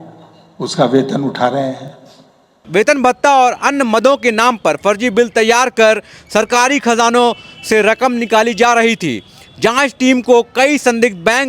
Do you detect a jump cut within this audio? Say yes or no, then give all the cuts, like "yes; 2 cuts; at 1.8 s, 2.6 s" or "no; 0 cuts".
yes; 1 cut; at 2.5 s